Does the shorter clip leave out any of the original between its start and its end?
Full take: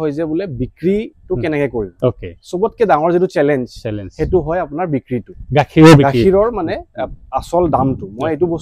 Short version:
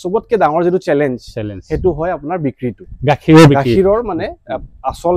no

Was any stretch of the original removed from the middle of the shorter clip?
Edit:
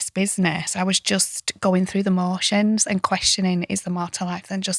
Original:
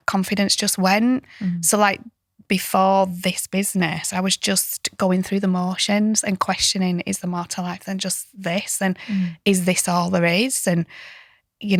no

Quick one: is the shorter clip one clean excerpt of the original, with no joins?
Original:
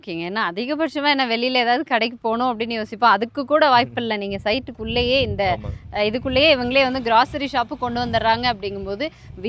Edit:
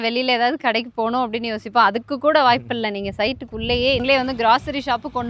no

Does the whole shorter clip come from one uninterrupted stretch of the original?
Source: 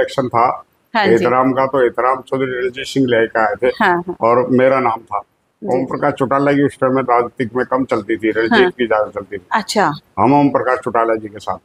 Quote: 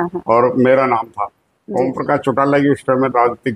yes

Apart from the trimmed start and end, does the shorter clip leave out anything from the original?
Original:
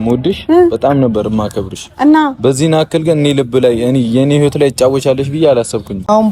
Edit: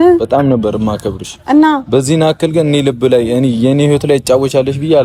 no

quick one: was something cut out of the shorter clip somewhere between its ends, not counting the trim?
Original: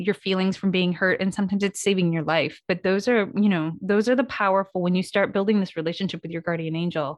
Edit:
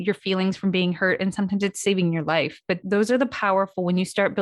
yes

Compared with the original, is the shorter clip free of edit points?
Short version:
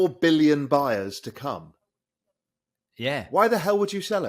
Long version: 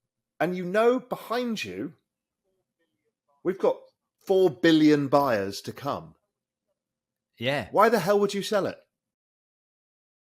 yes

